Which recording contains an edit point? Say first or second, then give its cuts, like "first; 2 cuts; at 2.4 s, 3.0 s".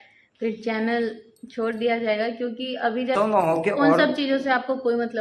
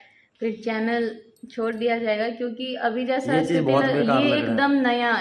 first; 1 cut; at 3.1 s